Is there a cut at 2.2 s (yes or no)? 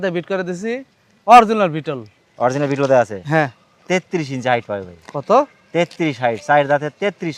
no